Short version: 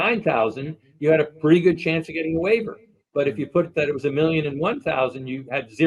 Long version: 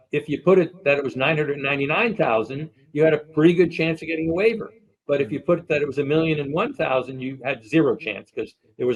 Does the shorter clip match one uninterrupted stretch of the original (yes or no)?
yes